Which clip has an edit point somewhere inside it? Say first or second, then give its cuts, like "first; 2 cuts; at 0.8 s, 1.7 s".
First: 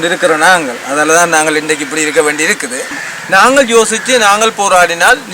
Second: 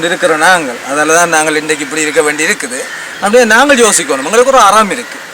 first; 1 cut; at 3.0 s